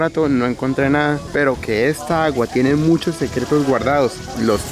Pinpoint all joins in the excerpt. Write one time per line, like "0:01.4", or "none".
none